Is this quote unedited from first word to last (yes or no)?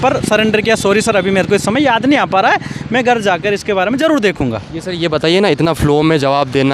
yes